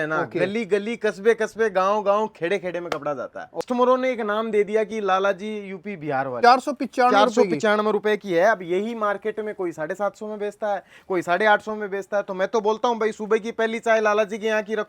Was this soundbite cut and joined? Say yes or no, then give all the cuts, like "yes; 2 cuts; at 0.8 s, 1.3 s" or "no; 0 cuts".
yes; 2 cuts; at 3.6 s, 6.3 s